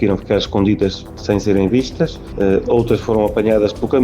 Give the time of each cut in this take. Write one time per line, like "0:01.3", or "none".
0:01.1
0:02.2